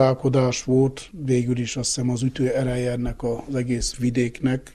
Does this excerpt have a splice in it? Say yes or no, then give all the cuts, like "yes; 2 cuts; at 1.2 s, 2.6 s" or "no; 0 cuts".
no; 0 cuts